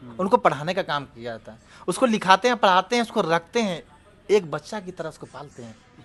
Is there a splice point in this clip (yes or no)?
no